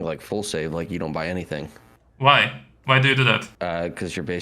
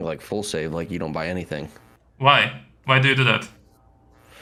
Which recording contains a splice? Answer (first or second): first